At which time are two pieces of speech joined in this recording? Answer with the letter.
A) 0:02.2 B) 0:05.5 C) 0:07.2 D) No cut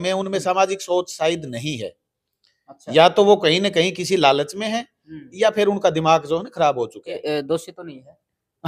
C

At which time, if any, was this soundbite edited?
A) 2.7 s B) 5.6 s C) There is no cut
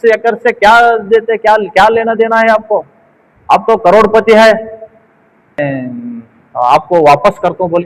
B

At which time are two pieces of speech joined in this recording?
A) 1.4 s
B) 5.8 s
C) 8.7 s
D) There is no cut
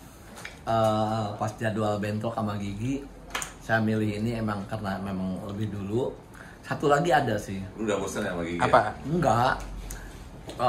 D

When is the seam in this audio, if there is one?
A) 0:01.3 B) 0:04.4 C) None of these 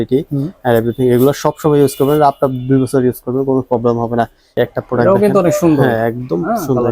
B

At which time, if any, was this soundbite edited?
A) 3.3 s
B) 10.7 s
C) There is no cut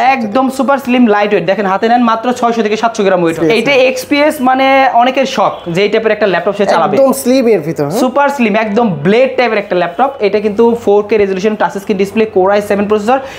A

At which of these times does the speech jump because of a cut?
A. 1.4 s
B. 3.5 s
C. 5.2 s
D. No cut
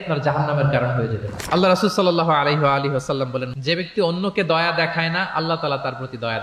B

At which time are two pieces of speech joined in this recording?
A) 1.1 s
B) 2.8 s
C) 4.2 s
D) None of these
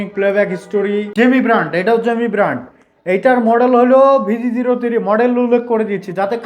A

